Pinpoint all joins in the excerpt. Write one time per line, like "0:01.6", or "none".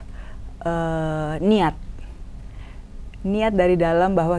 none